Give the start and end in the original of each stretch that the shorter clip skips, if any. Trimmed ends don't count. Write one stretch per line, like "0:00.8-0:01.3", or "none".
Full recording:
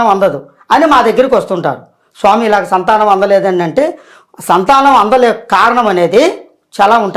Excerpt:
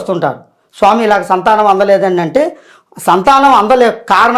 none